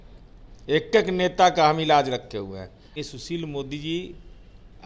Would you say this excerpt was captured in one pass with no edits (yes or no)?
no